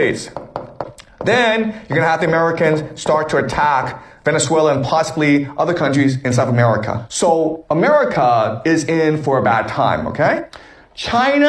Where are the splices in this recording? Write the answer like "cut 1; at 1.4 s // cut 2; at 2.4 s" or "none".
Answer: cut 1; at 4.8 s // cut 2; at 10.1 s

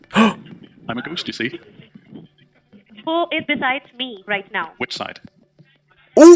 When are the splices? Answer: none

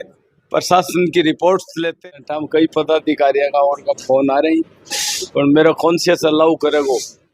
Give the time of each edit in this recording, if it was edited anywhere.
cut 1; at 2.1 s

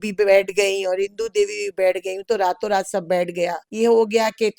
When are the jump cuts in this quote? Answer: cut 1; at 3.6 s

